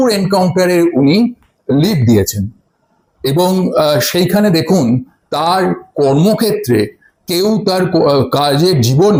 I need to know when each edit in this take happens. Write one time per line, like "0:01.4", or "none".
none